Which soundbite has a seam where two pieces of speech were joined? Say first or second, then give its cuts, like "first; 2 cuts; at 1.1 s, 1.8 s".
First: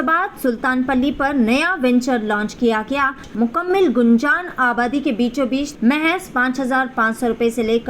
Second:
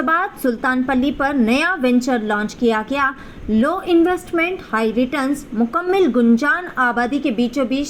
first; 2 cuts; at 3.3 s, 5.7 s